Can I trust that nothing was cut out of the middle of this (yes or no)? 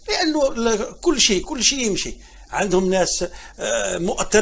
yes